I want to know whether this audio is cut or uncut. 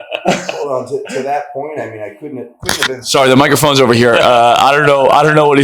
uncut